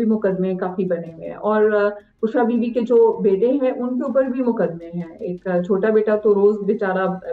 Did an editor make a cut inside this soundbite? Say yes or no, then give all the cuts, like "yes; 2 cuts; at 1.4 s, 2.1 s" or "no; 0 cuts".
no; 0 cuts